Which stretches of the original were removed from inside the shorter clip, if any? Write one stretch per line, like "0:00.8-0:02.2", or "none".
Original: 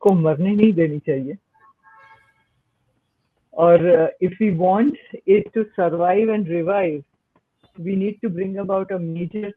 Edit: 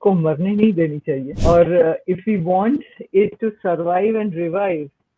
0:01.3-0:03.4